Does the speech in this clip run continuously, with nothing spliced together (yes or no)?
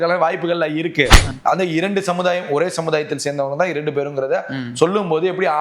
no